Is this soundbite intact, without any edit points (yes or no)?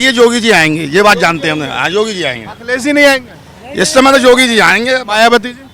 yes